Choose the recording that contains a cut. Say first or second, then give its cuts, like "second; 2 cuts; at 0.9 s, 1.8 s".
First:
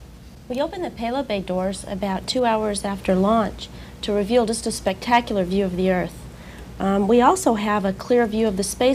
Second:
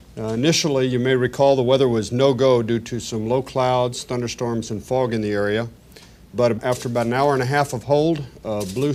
first; 1 cut; at 4.2 s